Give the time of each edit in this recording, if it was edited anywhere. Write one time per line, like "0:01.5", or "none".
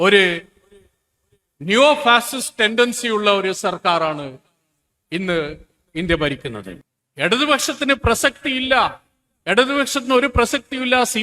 0:06.8